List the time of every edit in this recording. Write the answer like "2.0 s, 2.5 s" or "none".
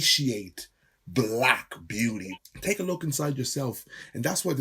2.3 s